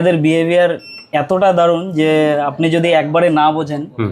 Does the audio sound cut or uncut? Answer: uncut